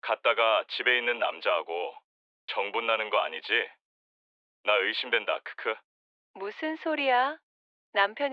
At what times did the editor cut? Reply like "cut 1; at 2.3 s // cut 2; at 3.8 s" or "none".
none